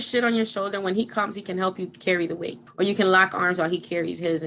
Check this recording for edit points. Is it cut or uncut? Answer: cut